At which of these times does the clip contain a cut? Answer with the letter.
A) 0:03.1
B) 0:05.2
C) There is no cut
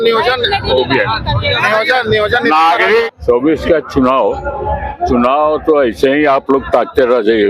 A